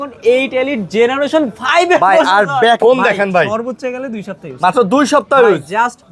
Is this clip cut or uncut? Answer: cut